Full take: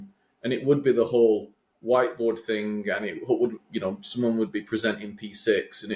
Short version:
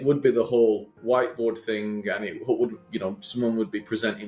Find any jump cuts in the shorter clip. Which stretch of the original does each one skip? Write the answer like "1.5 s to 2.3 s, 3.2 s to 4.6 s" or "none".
1.5 s to 1.7 s